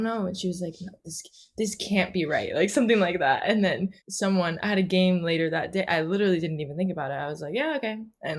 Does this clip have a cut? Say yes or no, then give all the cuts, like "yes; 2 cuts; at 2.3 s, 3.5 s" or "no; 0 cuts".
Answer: yes; 1 cut; at 4.0 s